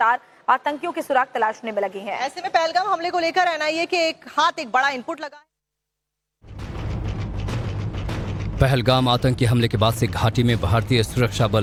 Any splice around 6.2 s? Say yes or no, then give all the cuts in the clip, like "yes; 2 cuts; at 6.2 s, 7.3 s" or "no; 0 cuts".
no; 0 cuts